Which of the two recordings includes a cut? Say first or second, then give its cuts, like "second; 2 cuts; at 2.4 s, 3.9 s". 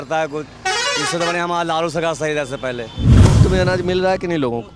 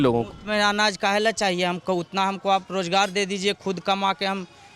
first; 1 cut; at 3.1 s